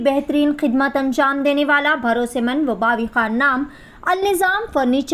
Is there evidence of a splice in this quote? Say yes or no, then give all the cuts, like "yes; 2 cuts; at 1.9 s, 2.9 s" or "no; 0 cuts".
no; 0 cuts